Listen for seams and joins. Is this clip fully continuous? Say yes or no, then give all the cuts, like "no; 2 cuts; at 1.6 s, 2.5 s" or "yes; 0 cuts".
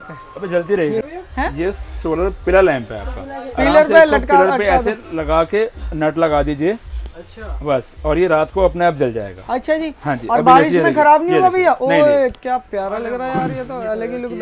no; 1 cut; at 1.0 s